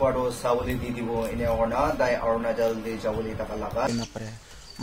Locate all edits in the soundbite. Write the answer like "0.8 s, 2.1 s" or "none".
3.9 s

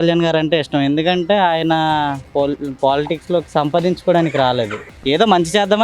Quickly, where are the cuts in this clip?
none

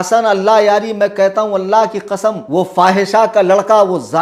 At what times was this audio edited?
2.4 s

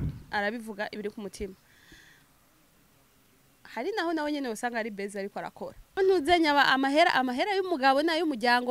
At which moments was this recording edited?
6.0 s

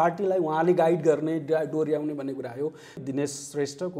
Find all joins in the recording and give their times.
3.0 s

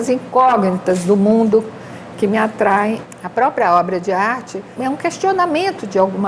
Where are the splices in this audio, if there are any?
3.1 s, 4.7 s

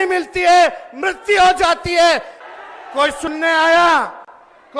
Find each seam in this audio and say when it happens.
2.3 s

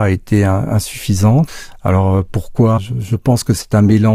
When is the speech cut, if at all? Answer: 1.6 s, 2.8 s

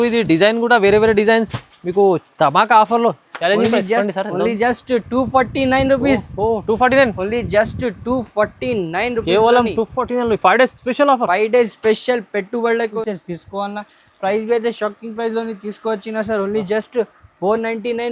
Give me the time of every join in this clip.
4.0 s, 12.9 s

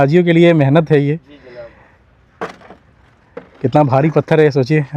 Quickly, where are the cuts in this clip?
none

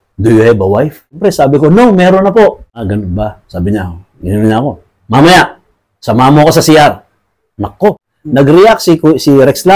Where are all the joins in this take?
1.2 s, 2.9 s, 8.1 s

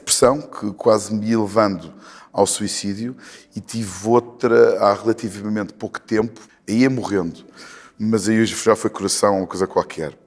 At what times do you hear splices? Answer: 6.4 s

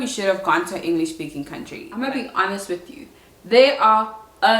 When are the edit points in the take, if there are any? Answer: 1.8 s

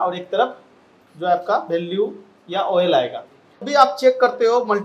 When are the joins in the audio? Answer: 3.6 s

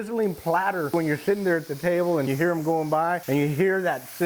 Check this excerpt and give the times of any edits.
0.9 s, 2.3 s, 3.2 s

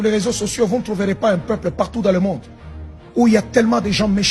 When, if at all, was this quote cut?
none

